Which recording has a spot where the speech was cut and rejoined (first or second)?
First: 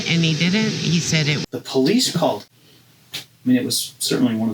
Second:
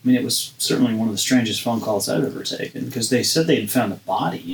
first